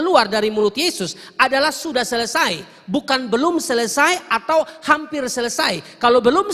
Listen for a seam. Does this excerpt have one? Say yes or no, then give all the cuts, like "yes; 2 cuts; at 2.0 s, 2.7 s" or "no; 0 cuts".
no; 0 cuts